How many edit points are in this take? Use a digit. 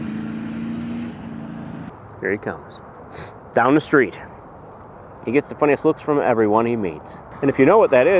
1